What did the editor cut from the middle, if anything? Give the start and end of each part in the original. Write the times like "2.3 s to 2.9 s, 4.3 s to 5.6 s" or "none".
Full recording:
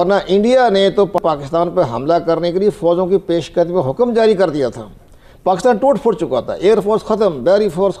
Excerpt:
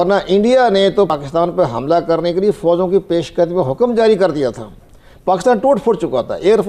1.1 s to 1.3 s

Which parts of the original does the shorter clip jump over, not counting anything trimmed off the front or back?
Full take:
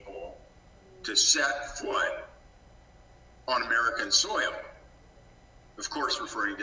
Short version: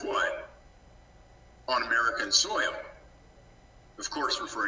none

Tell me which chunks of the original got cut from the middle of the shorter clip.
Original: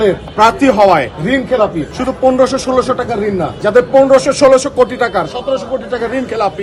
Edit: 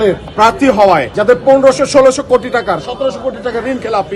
1.1 s to 3.6 s

